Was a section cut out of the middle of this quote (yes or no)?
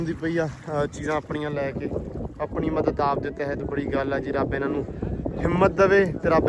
no